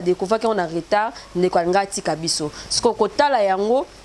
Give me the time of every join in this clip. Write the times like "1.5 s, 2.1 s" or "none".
none